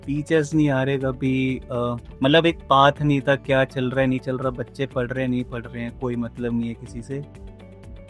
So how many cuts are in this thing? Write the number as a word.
zero